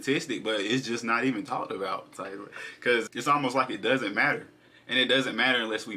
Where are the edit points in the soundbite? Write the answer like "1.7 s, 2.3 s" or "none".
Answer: 3.1 s